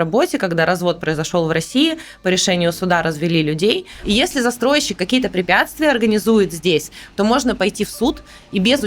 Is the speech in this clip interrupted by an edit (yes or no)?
yes